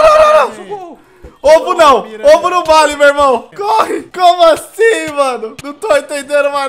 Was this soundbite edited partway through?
yes; 1 cut; at 4.0 s

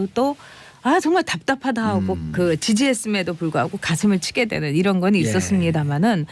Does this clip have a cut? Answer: yes; 1 cut; at 4.8 s

